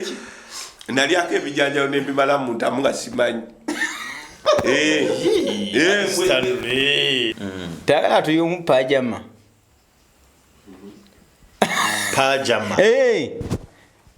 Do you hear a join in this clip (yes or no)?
yes